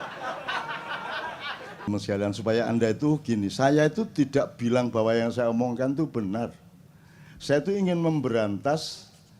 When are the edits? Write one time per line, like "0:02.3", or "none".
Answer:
0:01.9